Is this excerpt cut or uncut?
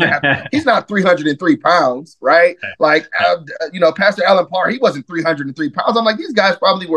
uncut